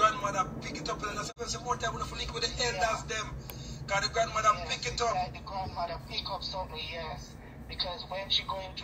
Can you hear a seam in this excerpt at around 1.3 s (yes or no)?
yes